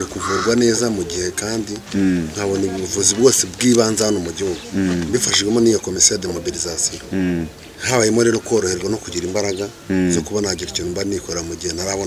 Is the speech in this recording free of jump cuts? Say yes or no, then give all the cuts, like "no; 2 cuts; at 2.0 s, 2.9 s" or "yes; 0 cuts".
yes; 0 cuts